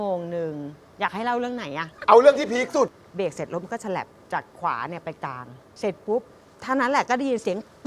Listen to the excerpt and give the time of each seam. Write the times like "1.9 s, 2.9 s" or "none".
1.7 s, 3.0 s

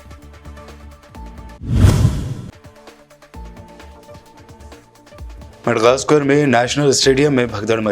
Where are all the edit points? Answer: none

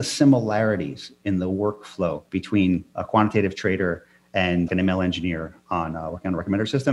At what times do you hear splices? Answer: 1.0 s, 2.6 s, 4.7 s

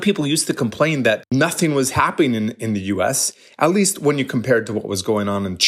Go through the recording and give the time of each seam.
1.3 s

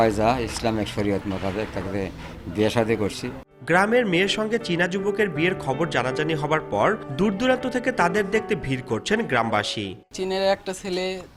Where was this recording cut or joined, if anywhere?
none

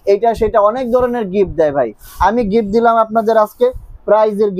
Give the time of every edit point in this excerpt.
none

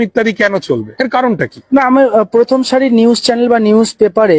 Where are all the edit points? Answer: 1.3 s

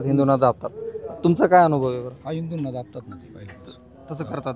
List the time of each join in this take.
none

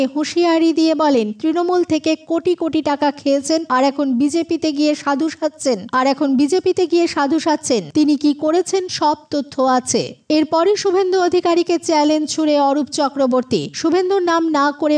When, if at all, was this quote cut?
none

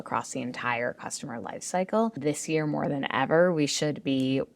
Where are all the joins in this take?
2.2 s

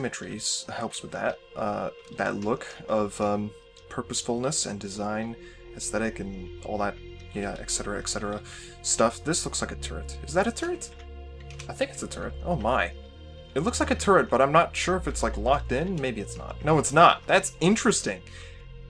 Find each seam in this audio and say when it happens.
4.4 s

